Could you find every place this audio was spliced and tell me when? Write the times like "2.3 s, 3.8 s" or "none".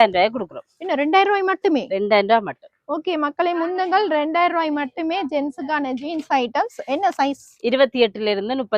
none